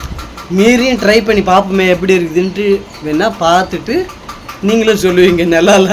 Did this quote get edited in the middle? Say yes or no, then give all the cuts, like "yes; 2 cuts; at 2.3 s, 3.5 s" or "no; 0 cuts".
no; 0 cuts